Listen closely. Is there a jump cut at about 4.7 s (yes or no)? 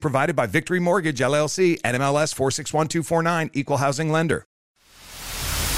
yes